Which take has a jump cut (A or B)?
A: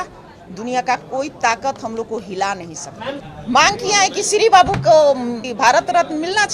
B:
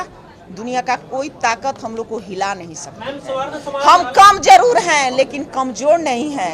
A